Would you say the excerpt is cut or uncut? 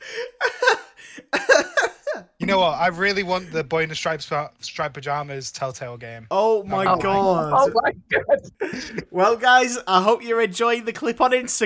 cut